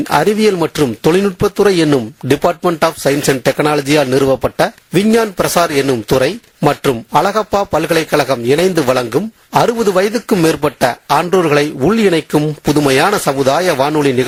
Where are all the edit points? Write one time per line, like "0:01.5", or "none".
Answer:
none